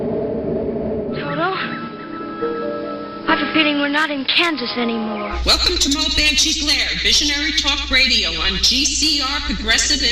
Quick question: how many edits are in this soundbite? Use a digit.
1